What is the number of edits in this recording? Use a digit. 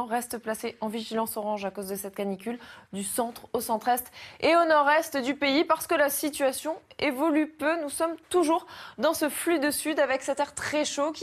0